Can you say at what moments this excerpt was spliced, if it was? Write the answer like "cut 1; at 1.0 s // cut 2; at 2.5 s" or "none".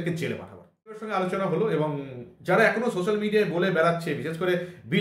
cut 1; at 1.1 s